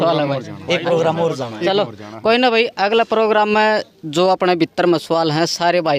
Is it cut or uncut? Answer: uncut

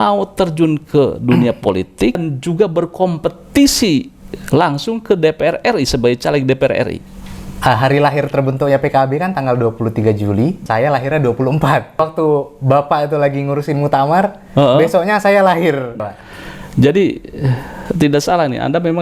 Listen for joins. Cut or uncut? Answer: cut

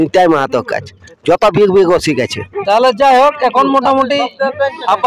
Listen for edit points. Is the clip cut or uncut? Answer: uncut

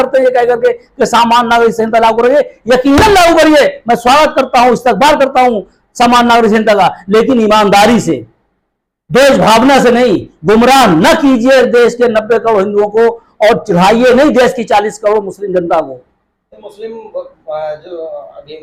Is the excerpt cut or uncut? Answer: uncut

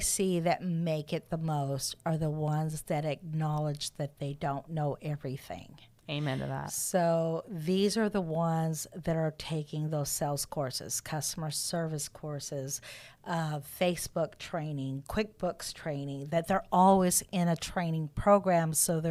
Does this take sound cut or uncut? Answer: uncut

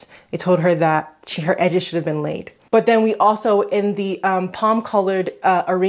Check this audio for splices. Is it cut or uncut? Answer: cut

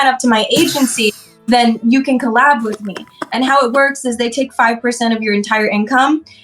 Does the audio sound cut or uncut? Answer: uncut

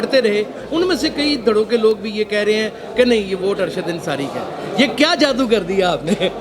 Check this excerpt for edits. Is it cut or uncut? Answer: uncut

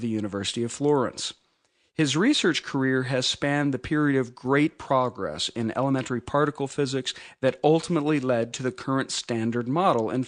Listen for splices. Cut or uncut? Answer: uncut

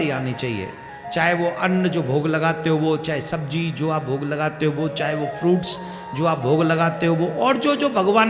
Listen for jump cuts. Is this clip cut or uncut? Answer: uncut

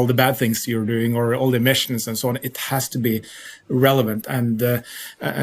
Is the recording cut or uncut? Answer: cut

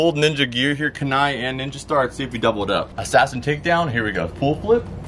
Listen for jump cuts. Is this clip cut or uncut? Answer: uncut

